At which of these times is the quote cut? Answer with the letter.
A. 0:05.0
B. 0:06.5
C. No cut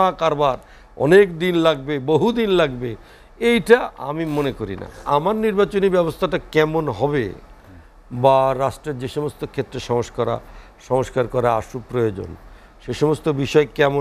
A